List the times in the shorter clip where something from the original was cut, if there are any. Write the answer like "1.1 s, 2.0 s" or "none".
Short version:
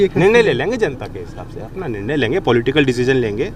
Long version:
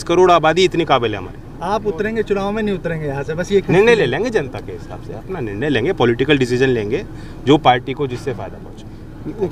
none

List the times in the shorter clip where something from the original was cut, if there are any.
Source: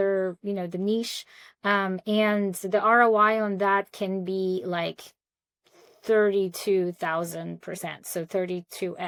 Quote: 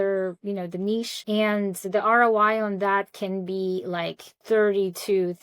1.2 s, 4.3 s

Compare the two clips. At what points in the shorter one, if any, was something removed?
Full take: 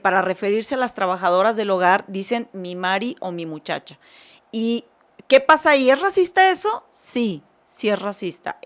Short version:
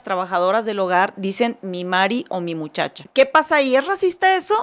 3.0 s

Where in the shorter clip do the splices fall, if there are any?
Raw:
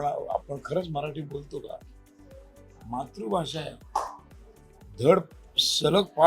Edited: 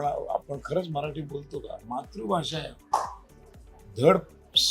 1.8 s

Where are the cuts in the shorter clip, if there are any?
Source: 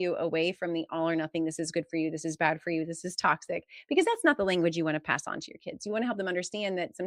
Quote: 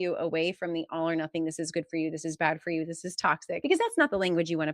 3.6 s

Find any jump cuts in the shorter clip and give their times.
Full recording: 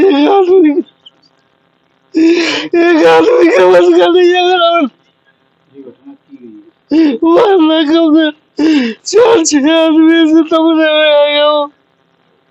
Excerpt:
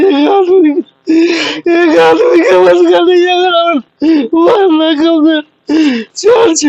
0.9 s, 3.9 s

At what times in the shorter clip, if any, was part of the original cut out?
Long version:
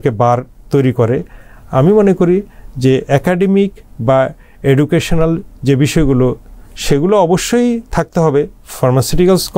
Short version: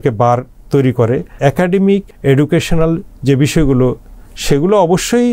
1.4 s, 2.1 s

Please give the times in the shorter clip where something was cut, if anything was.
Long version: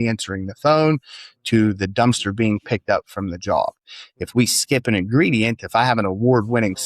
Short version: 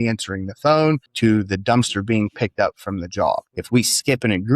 1.1 s, 3.5 s

